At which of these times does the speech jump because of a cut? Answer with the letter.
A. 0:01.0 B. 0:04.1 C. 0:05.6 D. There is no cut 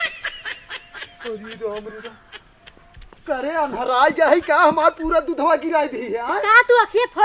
A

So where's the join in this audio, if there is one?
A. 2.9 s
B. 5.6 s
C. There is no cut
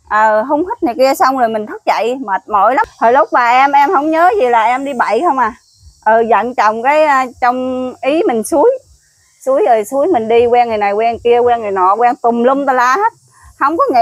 A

